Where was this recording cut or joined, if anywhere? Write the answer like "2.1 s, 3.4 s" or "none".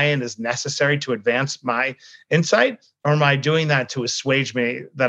none